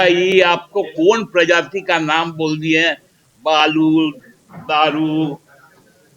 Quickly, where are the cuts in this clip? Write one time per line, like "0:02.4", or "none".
none

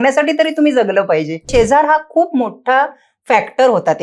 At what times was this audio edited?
0:01.5

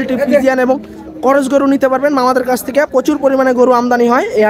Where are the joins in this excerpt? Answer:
none

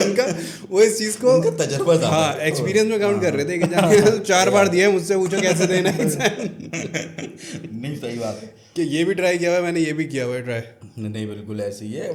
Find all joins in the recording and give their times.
none

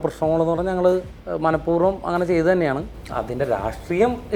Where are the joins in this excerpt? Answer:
0:01.2
0:02.9

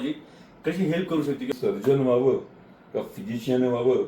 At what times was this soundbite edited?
0:01.5

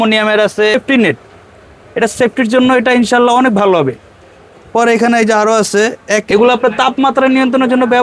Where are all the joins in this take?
0:00.7
0:06.2

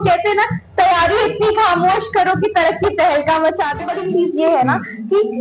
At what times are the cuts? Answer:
0:03.9

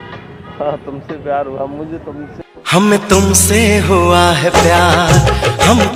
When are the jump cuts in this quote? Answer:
none

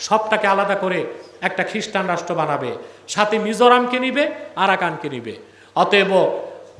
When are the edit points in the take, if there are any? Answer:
none

